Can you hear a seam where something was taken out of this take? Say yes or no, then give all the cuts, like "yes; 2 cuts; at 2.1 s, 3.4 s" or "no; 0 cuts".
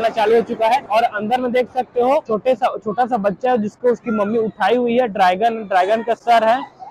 yes; 2 cuts; at 0.8 s, 2.3 s